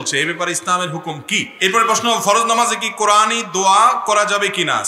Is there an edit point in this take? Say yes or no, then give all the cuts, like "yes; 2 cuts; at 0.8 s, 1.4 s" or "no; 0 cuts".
yes; 1 cut; at 1.5 s